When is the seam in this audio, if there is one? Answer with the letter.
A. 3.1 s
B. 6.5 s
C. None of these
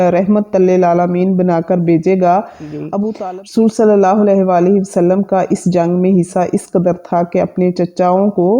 A